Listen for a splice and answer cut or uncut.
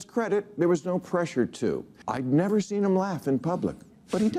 cut